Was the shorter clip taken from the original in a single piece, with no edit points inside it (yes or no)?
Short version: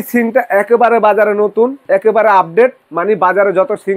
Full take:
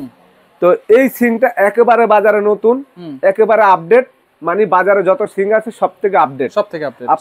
no